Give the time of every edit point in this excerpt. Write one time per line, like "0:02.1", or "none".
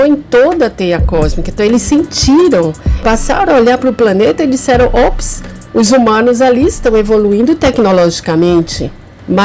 none